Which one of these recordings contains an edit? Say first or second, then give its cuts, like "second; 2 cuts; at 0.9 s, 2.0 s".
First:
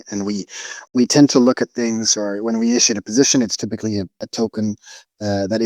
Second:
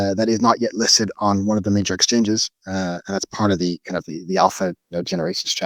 first; 2 cuts; at 0.9 s, 4.2 s